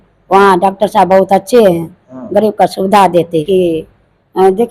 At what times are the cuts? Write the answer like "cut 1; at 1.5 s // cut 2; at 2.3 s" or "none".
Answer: cut 1; at 3.4 s